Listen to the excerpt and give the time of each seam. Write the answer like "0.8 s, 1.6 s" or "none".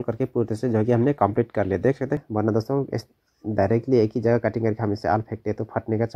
2.2 s